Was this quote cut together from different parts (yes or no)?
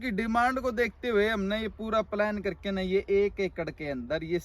no